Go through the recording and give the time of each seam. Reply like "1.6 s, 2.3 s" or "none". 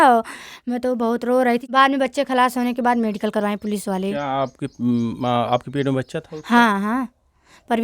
1.7 s